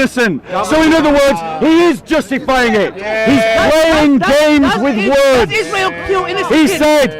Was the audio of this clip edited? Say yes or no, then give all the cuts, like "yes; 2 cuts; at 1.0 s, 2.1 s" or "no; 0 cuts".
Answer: no; 0 cuts